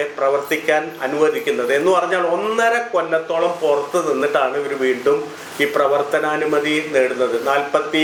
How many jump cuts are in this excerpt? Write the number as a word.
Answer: zero